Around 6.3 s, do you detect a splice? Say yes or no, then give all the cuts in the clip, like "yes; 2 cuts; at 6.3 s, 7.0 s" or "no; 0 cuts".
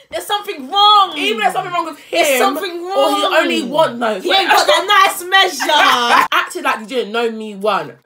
yes; 1 cut; at 6.3 s